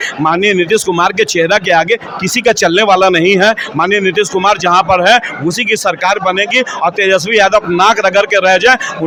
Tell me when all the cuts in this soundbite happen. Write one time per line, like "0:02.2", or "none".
none